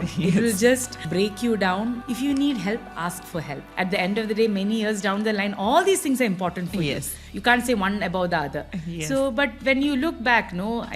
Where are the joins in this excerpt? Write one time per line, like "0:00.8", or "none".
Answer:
0:01.0
0:02.0
0:03.6
0:07.2